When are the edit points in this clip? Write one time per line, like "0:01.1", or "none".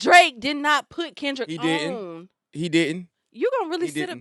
none